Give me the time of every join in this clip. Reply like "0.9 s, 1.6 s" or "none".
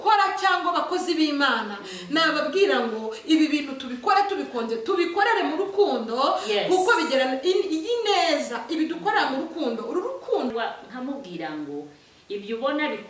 10.5 s